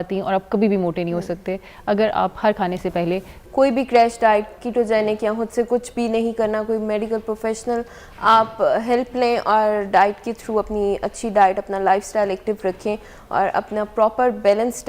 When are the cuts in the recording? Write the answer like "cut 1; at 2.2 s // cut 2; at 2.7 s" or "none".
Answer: cut 1; at 3.4 s